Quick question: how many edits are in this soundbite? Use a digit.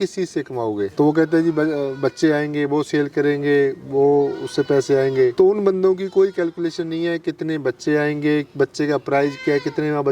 2